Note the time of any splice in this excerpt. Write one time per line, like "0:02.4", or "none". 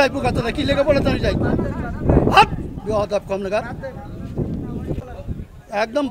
0:05.0